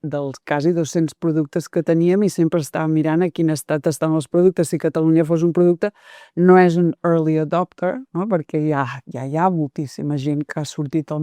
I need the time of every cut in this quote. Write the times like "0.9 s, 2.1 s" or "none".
none